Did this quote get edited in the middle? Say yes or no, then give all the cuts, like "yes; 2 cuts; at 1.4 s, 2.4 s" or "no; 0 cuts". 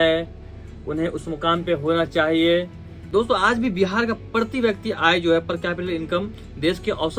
yes; 1 cut; at 3.1 s